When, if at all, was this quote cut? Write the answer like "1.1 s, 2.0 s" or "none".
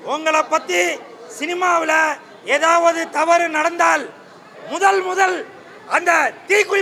none